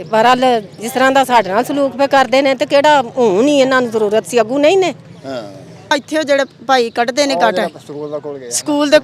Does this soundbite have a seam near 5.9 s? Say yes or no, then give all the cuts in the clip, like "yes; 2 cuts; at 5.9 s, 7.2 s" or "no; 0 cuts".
yes; 1 cut; at 5.9 s